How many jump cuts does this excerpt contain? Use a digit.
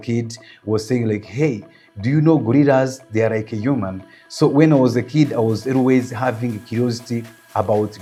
0